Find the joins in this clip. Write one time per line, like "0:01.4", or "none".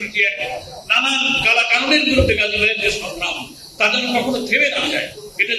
none